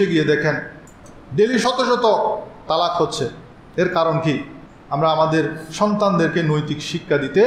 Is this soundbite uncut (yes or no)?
no